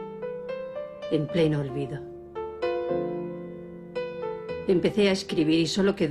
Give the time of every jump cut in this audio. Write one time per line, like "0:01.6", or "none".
0:04.2